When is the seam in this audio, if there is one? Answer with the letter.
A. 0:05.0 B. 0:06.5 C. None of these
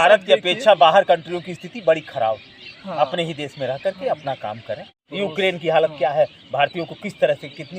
A